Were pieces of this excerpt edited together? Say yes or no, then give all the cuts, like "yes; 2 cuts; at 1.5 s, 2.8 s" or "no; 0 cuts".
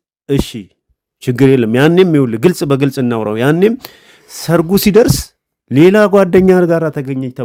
no; 0 cuts